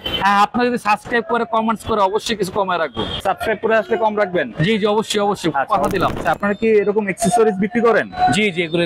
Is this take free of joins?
no; 2 cuts; at 3.2 s, 6.2 s

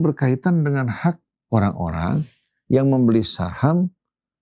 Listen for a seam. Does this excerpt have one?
yes; 1 cut; at 1.3 s

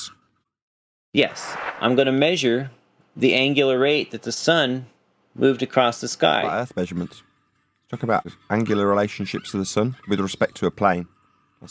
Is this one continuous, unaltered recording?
no; 3 cuts; at 1.6 s, 6.5 s, 8.3 s

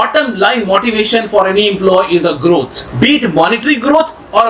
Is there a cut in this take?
no; 0 cuts

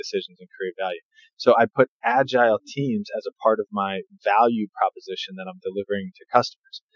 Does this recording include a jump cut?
no; 0 cuts

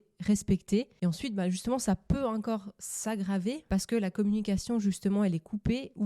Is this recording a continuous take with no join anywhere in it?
no; 2 cuts; at 0.9 s, 3.6 s

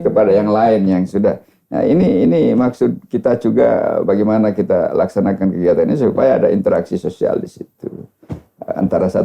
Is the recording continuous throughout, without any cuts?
yes; 0 cuts

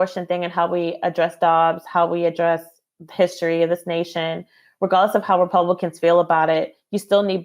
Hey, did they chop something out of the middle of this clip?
no; 0 cuts

